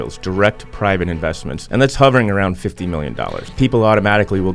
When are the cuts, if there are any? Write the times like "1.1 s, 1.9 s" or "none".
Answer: 1.5 s, 3.5 s